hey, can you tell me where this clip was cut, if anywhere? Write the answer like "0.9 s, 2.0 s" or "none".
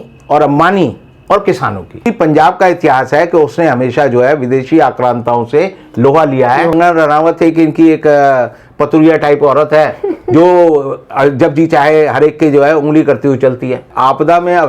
2.1 s, 6.7 s, 13.9 s